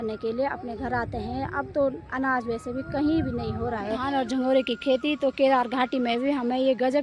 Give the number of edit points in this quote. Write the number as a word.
one